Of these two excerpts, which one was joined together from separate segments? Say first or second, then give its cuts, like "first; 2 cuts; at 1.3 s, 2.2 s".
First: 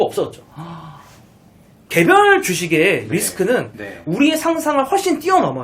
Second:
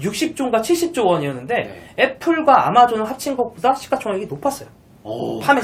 first; 1 cut; at 1.7 s